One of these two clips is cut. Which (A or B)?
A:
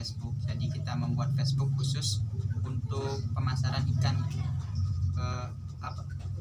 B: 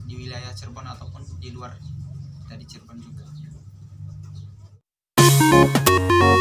B